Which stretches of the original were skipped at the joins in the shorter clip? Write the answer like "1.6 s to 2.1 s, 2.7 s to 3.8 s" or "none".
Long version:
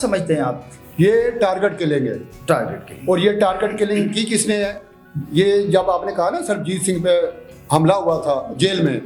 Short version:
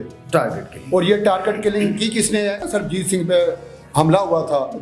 4.8 s to 6.4 s